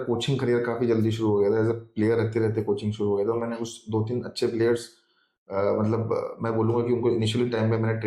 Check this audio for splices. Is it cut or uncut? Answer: uncut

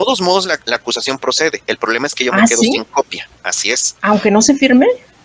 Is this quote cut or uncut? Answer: uncut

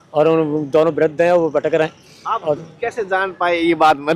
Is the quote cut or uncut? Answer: uncut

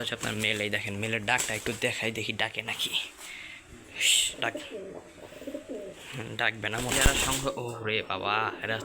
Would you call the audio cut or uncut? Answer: cut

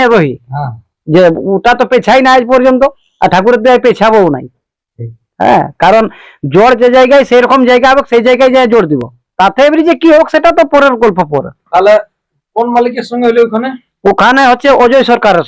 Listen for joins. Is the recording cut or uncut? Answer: uncut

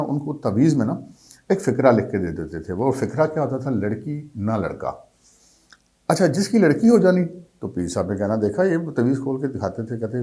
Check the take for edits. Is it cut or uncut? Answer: uncut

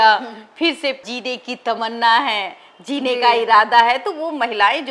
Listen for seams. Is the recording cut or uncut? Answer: uncut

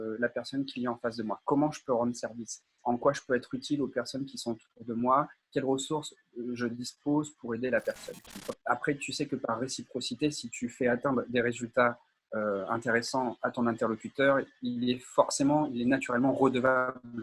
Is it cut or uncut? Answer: cut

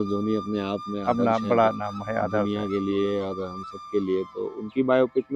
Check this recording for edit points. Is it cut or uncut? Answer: uncut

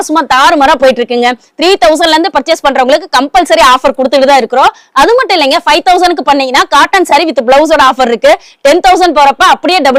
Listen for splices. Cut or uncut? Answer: uncut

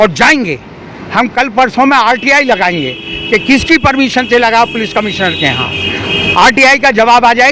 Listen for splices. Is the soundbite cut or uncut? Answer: uncut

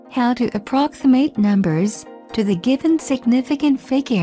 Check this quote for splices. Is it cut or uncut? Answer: cut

